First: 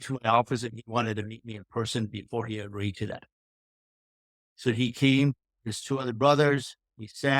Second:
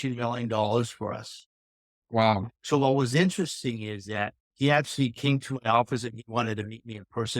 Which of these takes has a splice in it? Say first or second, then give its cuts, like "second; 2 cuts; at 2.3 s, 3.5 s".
second; 2 cuts; at 2.6 s, 4.4 s